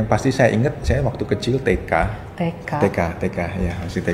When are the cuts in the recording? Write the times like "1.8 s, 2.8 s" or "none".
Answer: 2.2 s